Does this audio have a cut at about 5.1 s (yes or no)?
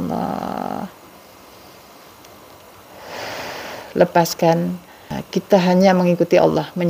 yes